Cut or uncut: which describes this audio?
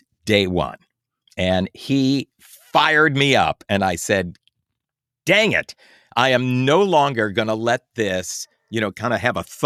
uncut